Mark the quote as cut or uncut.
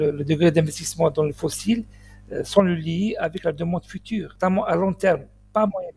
cut